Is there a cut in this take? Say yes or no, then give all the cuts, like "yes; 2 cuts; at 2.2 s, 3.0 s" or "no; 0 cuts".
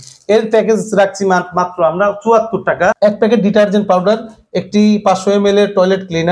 yes; 1 cut; at 3.0 s